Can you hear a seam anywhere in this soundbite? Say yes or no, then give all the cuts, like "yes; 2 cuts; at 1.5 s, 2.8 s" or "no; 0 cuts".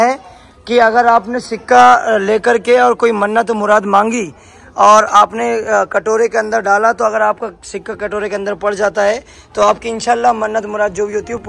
no; 0 cuts